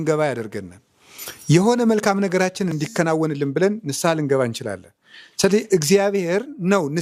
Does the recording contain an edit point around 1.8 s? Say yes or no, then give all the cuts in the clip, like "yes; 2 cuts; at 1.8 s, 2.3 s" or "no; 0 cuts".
no; 0 cuts